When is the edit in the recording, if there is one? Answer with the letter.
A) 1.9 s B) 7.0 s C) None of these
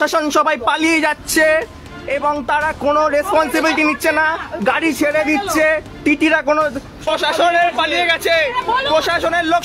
B